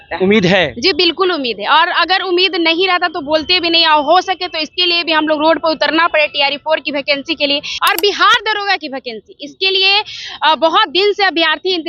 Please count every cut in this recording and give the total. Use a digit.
1